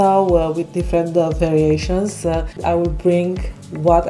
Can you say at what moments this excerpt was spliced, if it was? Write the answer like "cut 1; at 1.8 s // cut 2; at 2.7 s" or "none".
cut 1; at 2.5 s

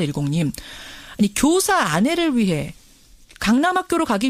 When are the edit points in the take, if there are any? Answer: none

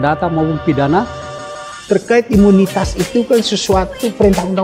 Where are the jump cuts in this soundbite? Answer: cut 1; at 1.3 s

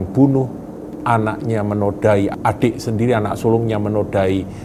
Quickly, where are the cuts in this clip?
cut 1; at 2.4 s

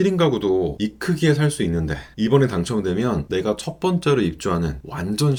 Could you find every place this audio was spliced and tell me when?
none

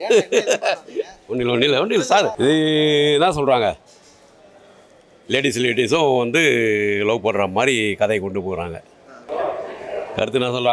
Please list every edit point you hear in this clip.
cut 1; at 2.3 s // cut 2; at 9.2 s

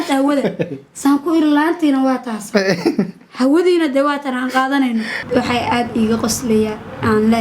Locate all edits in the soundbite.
cut 1; at 5.2 s

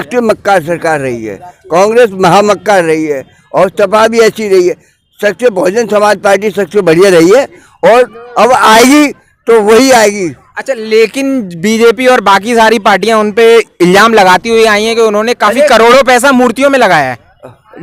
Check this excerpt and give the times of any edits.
none

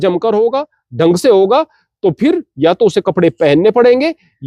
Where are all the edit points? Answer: none

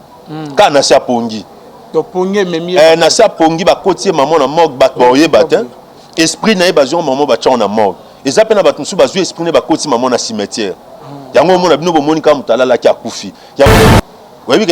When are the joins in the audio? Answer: cut 1; at 13.7 s

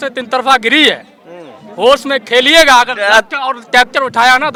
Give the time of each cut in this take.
none

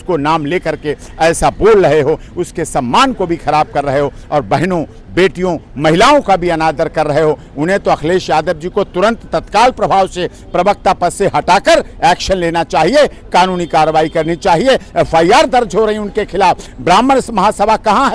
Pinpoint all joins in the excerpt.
none

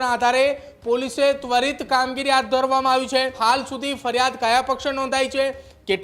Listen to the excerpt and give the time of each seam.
cut 1; at 3.4 s

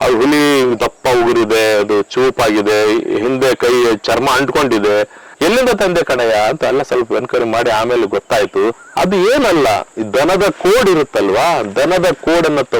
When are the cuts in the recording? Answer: cut 1; at 5.2 s // cut 2; at 8.8 s

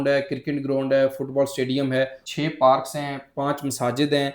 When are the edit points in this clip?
cut 1; at 2.2 s

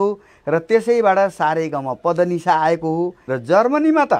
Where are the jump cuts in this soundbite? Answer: cut 1; at 3.3 s

